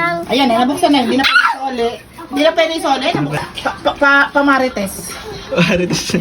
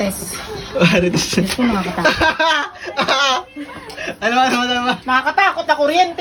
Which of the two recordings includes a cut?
first; 1 cut; at 3.4 s

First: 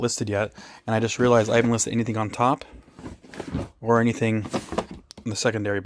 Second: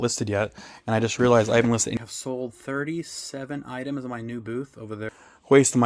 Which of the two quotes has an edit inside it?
second; 2 cuts; at 2.0 s, 5.0 s

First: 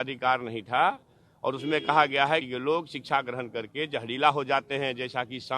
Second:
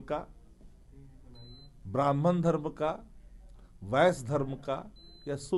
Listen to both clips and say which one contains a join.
first; 1 cut; at 2.4 s

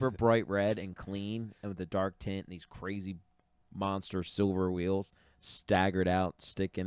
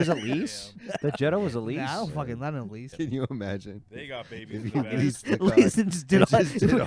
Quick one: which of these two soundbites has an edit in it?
second; 1 cut; at 2.8 s

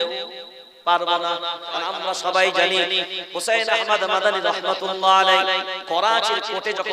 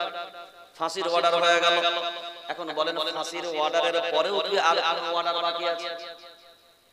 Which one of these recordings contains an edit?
first; 1 cut; at 1.7 s

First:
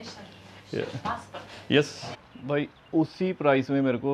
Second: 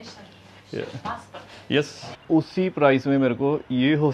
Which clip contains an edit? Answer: second; 1 cut; at 2.1 s

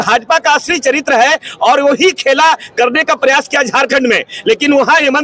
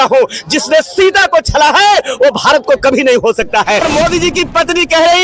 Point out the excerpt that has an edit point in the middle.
second; 1 cut; at 3.9 s

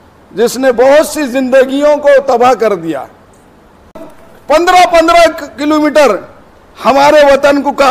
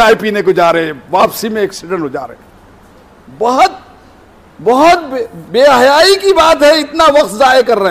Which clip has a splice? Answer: first; 1 cut; at 4.0 s

